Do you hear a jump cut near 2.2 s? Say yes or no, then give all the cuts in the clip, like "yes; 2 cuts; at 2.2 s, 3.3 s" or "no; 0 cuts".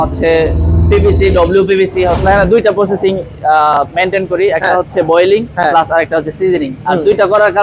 yes; 1 cut; at 2.2 s